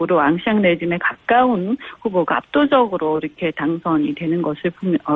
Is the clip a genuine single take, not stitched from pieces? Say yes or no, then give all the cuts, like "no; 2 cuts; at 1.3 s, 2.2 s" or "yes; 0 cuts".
yes; 0 cuts